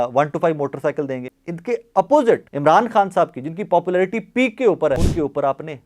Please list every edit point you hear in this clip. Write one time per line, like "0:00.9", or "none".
0:01.3
0:02.5
0:05.0